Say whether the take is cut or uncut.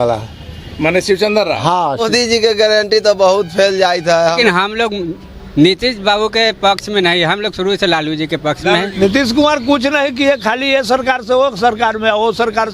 cut